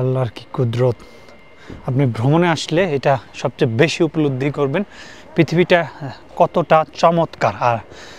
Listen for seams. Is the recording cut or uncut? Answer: uncut